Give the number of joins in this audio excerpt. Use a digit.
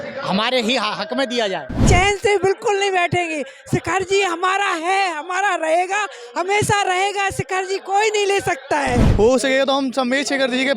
2